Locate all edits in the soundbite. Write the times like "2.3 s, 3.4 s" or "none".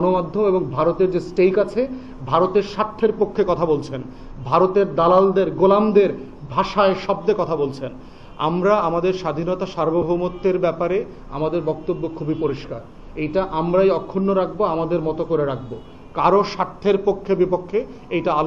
none